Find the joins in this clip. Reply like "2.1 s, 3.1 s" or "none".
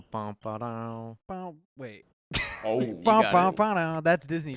1.2 s

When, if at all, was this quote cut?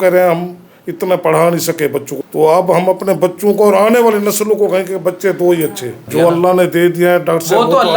2.1 s, 5.9 s

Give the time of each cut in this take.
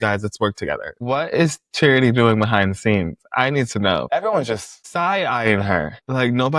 1.0 s, 4.0 s

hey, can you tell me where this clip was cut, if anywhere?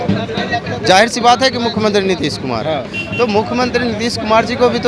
none

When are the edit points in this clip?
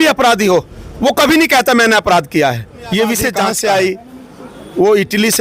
3.4 s

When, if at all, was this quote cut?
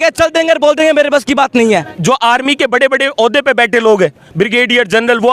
1.9 s

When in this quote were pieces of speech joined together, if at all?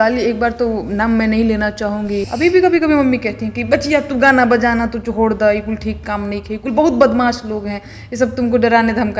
2.3 s

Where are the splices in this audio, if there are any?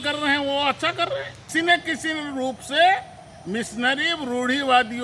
1.1 s

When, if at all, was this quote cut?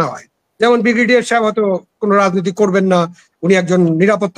none

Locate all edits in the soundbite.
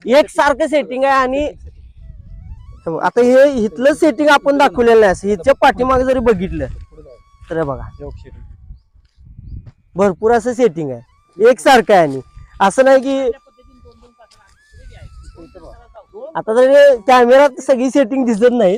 none

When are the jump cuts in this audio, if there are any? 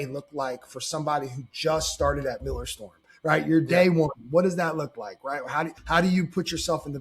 5.8 s

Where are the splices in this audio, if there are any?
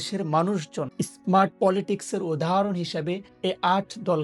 1.4 s, 3.3 s

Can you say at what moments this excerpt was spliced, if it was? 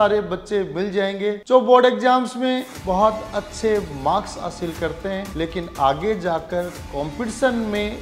1.4 s, 5.3 s

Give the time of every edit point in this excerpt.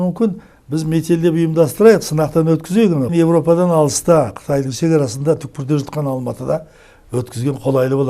3.1 s

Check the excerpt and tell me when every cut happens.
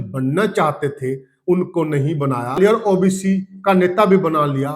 2.5 s

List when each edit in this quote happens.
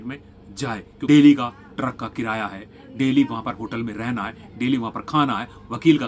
0.9 s

